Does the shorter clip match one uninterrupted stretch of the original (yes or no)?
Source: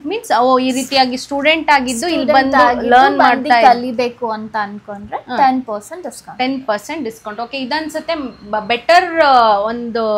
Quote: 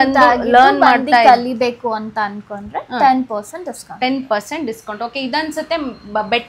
yes